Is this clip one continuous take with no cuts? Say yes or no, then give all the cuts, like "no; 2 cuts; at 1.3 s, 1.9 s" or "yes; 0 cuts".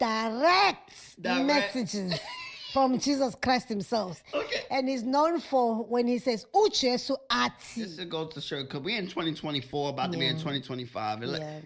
no; 1 cut; at 7.9 s